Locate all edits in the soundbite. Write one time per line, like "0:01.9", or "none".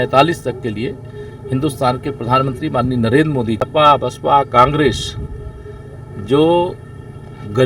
0:03.6